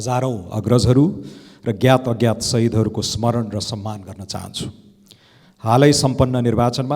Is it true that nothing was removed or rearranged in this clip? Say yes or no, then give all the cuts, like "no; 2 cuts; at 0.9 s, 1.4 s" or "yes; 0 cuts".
yes; 0 cuts